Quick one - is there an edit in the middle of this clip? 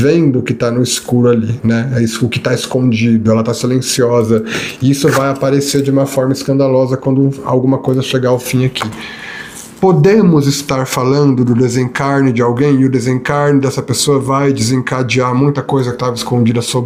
no; 0 cuts

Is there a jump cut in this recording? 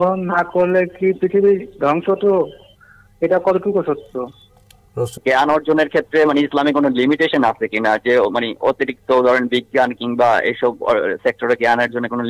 yes; 1 cut; at 5.1 s

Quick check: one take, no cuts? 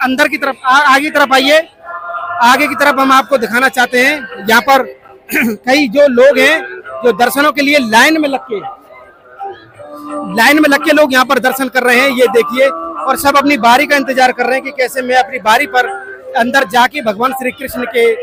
yes; 0 cuts

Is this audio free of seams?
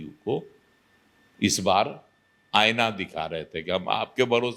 yes; 0 cuts

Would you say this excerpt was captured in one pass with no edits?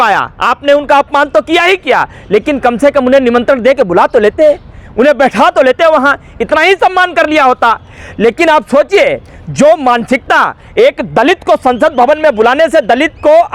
yes; 0 cuts

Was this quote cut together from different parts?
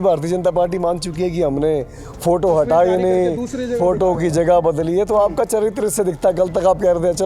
no; 0 cuts

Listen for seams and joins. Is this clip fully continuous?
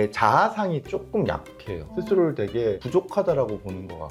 yes; 0 cuts

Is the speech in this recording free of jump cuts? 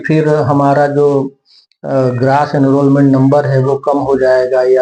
yes; 0 cuts

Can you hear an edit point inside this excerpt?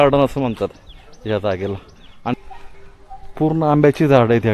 yes; 1 cut; at 2.4 s

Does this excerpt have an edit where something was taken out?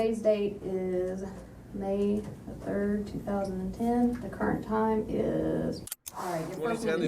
yes; 1 cut; at 5.9 s

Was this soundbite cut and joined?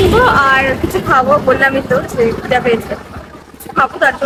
no; 0 cuts

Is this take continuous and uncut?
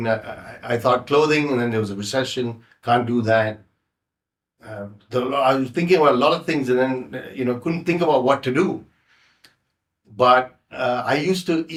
yes; 0 cuts

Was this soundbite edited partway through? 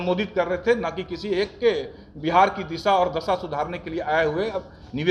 no; 0 cuts

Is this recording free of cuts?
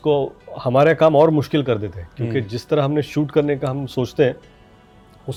yes; 0 cuts

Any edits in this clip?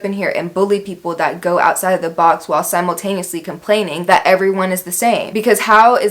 no; 0 cuts

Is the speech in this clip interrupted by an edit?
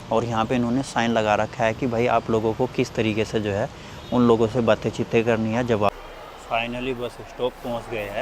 yes; 1 cut; at 5.9 s

